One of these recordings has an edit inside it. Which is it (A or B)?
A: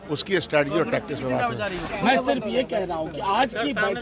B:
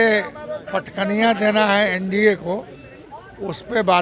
A